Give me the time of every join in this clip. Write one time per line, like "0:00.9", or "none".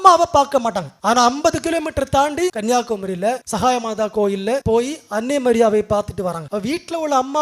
0:00.9
0:02.6
0:03.5
0:04.6
0:06.4